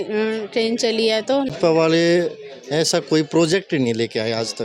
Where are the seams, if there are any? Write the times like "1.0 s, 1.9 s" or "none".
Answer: 1.5 s